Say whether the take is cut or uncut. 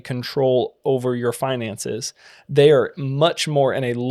uncut